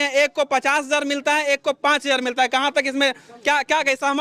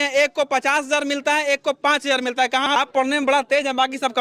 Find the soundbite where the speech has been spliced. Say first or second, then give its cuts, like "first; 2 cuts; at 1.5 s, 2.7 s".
second; 1 cut; at 2.8 s